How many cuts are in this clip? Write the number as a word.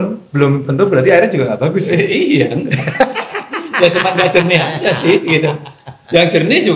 zero